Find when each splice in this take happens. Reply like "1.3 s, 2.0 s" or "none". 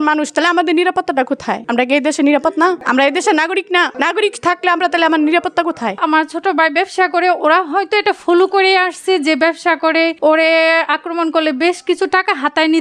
6.0 s